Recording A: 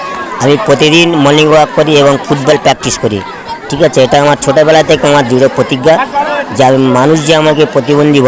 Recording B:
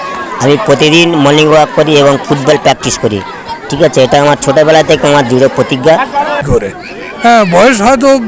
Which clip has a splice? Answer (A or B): B